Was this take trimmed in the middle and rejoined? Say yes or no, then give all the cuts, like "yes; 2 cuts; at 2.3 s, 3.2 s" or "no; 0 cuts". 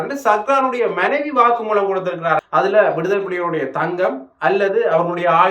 yes; 1 cut; at 2.4 s